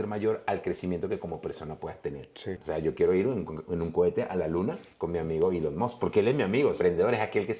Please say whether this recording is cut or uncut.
cut